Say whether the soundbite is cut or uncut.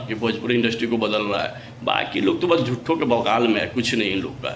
uncut